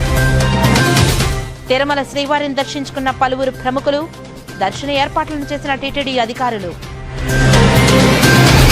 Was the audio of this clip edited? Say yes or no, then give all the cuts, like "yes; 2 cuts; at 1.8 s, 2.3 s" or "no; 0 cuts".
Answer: yes; 1 cut; at 1.0 s